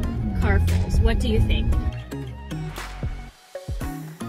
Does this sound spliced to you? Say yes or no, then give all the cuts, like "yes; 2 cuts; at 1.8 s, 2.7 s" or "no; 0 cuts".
yes; 1 cut; at 1.8 s